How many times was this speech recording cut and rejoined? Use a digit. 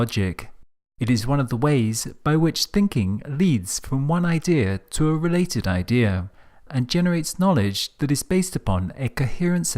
1